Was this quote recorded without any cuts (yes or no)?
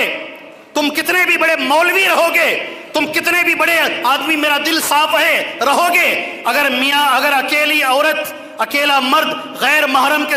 yes